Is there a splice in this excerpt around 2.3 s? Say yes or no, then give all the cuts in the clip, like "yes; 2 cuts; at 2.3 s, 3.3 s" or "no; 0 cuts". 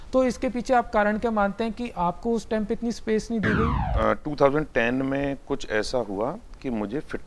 no; 1 cut; at 3.8 s